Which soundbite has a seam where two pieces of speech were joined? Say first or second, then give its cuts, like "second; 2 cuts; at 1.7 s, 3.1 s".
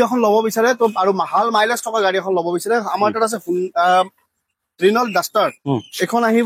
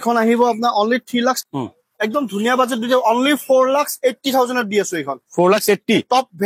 second; 1 cut; at 1.4 s